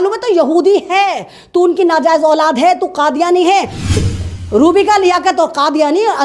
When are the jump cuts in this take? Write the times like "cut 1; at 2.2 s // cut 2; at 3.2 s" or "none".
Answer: cut 1; at 4.0 s

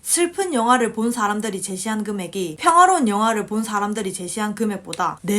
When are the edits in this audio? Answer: cut 1; at 2.5 s

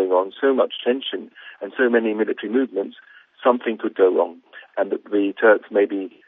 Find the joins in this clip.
none

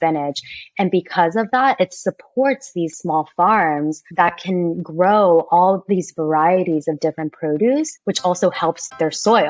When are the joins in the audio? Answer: cut 1; at 2.9 s // cut 2; at 4.1 s // cut 3; at 7.9 s

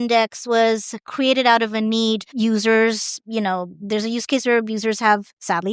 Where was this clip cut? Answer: cut 1; at 2.3 s

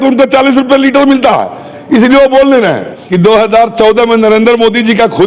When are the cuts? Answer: cut 1; at 3.0 s

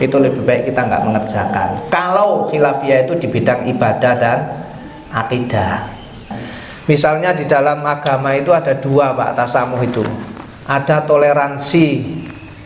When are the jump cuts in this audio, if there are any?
cut 1; at 6.4 s

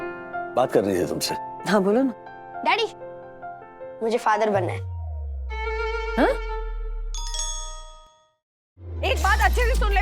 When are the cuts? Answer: cut 1; at 8.8 s

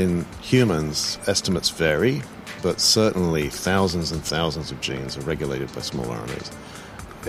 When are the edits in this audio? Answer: cut 1; at 1.1 s

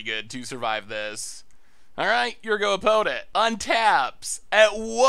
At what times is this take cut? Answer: cut 1; at 3.2 s

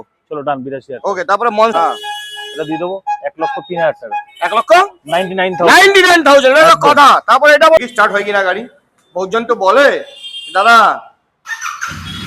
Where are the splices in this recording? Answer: cut 1; at 1.7 s // cut 2; at 7.8 s

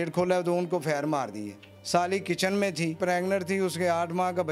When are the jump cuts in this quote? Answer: cut 1; at 1.7 s // cut 2; at 3.0 s

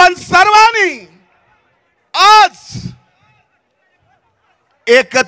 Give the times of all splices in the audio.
none

